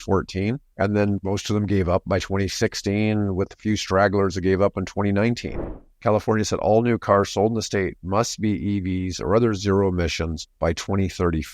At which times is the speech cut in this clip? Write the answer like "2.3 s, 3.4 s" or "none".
5.6 s